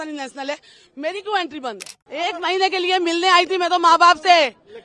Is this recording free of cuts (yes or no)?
no